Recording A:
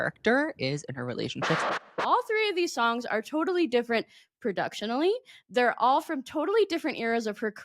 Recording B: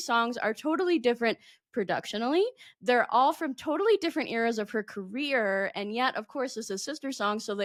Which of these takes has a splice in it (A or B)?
A